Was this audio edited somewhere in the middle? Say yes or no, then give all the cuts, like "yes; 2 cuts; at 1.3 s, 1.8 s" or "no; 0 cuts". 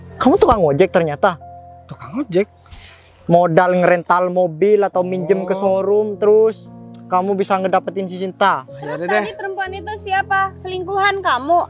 no; 0 cuts